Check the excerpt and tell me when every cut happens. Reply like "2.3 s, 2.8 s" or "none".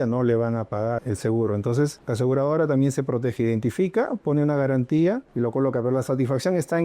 1.0 s, 2.0 s, 5.3 s